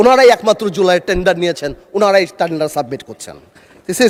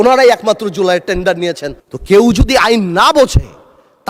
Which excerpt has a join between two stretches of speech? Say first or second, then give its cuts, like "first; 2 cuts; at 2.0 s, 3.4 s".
second; 1 cut; at 1.8 s